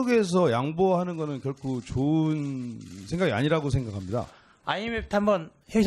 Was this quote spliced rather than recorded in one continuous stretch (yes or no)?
yes